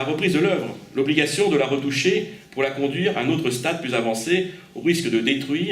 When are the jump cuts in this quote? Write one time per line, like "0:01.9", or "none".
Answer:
0:02.5